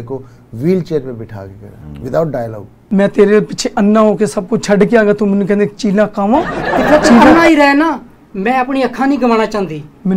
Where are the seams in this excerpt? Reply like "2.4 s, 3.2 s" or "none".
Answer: 2.8 s